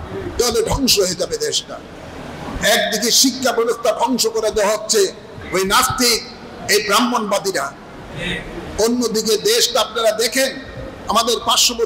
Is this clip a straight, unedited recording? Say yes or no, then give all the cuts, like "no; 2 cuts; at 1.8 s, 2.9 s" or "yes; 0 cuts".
yes; 0 cuts